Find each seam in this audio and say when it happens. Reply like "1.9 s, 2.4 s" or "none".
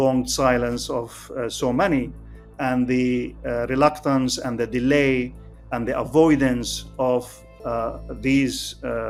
none